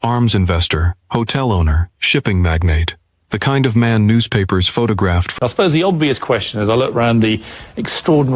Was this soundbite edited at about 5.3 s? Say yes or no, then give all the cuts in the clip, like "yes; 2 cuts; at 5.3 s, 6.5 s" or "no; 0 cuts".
yes; 1 cut; at 5.3 s